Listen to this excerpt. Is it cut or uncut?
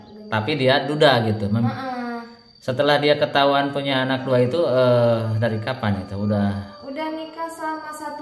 uncut